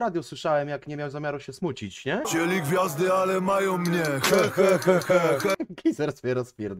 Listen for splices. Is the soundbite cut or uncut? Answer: cut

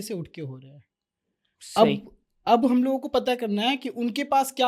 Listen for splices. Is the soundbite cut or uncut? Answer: uncut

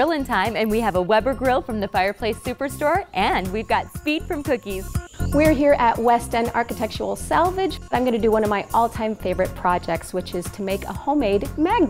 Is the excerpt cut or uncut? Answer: cut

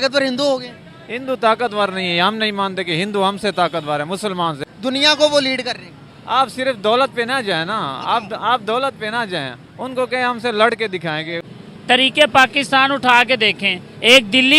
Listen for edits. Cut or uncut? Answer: cut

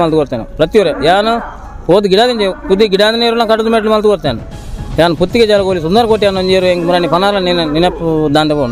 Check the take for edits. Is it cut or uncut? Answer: uncut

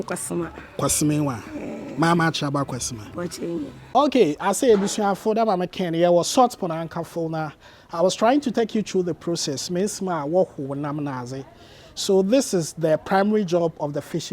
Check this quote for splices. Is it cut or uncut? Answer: cut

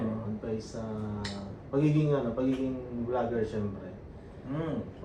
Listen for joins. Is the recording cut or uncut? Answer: uncut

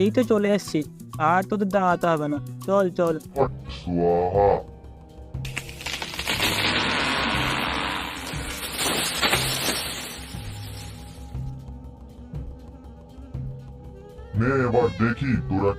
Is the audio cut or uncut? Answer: cut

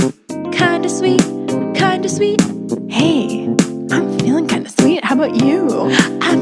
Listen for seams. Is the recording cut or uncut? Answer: uncut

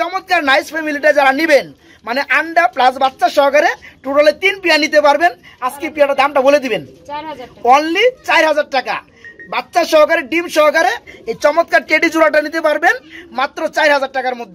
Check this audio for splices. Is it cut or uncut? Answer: uncut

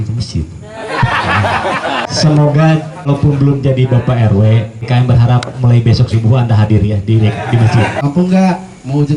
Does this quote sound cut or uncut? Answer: cut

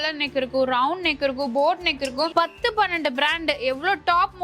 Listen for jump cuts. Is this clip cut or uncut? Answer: cut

